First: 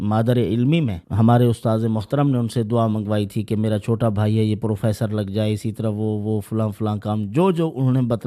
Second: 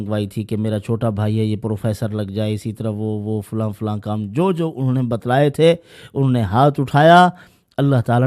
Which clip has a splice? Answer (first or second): first